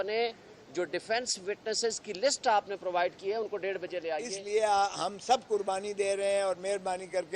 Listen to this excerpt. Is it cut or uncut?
cut